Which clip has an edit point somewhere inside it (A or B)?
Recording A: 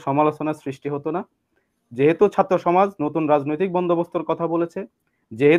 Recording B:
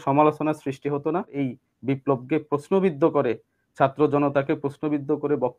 B